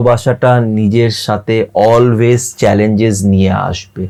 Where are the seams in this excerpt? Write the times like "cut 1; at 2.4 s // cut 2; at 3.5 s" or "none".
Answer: none